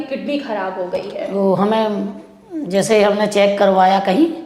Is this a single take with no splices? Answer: yes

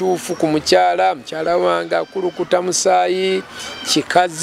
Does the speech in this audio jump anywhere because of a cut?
no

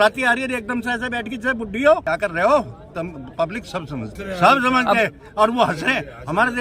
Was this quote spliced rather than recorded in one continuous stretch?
yes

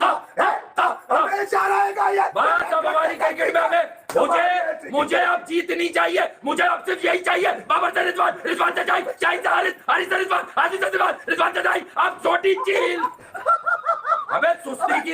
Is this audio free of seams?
yes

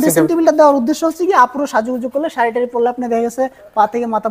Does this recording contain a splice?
no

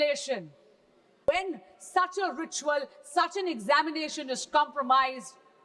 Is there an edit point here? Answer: yes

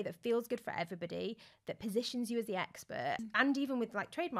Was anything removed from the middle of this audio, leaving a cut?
yes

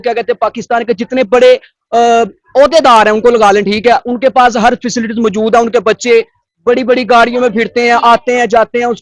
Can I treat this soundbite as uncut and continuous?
yes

